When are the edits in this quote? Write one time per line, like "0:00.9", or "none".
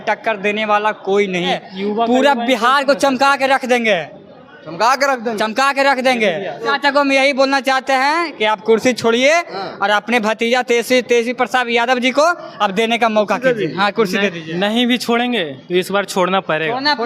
0:01.6
0:06.7